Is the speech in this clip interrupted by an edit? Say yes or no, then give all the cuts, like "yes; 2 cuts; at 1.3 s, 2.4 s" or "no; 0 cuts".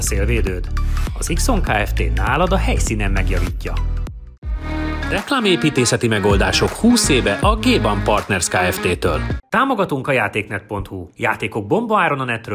yes; 2 cuts; at 4.4 s, 9.4 s